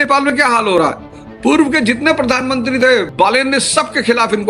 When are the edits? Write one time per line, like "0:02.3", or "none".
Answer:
0:03.1